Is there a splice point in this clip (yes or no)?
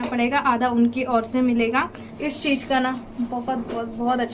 yes